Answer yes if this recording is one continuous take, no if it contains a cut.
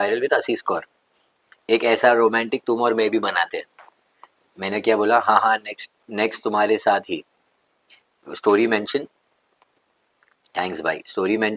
yes